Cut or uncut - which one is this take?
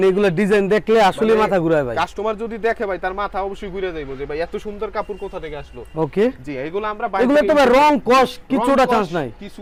uncut